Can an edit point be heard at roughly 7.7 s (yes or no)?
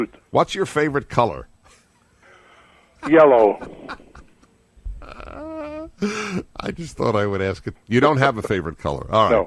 yes